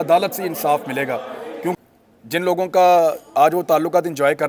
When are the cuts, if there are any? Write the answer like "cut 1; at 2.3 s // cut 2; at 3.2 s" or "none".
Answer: cut 1; at 1.8 s